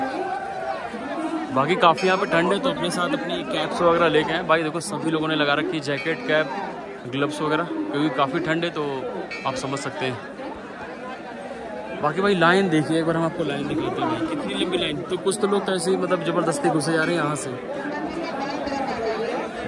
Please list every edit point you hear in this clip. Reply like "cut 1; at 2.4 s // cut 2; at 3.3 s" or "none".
none